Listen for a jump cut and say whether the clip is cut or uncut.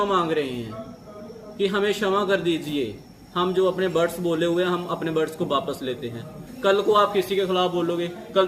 cut